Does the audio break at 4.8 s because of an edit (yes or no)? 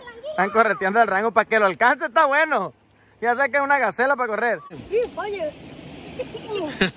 yes